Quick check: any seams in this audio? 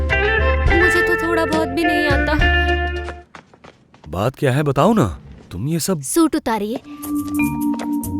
yes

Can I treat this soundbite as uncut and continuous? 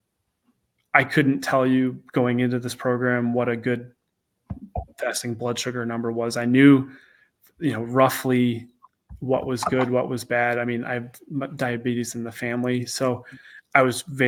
yes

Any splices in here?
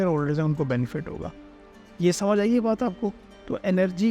no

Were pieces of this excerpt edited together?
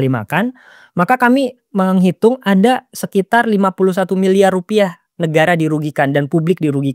no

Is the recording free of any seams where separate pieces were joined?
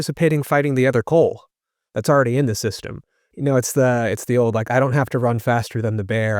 no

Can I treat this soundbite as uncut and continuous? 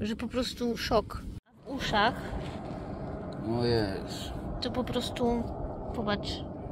no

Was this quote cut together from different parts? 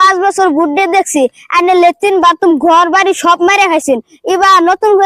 no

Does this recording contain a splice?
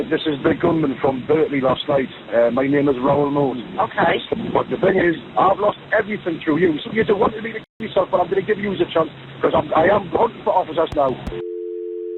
yes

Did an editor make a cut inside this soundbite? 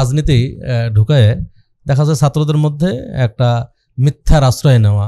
no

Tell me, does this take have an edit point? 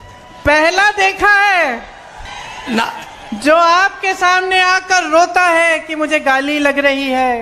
yes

